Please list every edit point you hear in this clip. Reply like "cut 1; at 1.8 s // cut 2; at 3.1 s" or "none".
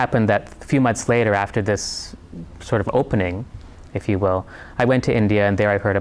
none